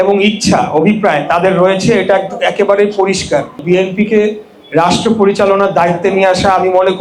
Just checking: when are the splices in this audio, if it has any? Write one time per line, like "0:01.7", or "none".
0:03.6